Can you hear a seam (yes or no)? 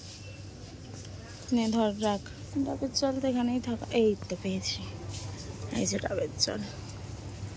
yes